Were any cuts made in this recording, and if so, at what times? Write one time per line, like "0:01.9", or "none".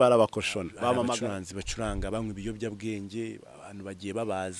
0:01.1